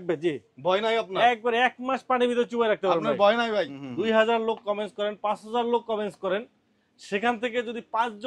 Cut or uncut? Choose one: cut